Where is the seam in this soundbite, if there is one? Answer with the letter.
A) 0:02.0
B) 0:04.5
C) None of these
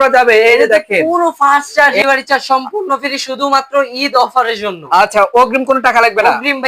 A